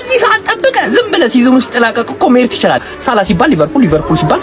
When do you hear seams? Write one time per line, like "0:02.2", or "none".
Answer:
0:02.8